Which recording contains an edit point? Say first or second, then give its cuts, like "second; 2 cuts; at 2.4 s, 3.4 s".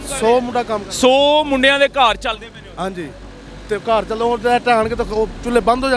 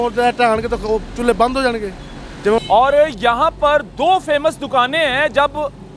second; 1 cut; at 2.6 s